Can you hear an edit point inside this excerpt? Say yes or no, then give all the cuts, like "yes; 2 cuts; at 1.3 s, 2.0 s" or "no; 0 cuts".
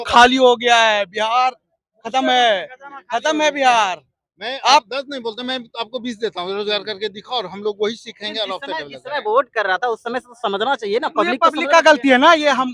no; 0 cuts